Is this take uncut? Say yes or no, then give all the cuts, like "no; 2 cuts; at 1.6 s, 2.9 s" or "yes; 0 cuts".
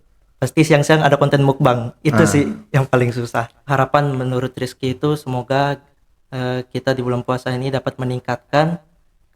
no; 1 cut; at 3.6 s